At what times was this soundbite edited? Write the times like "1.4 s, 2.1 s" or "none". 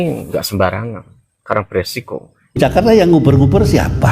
2.6 s